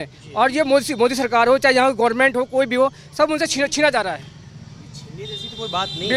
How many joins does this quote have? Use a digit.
0